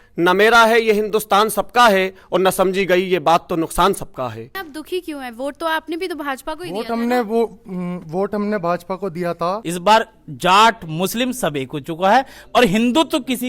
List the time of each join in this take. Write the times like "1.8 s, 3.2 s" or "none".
4.5 s, 9.6 s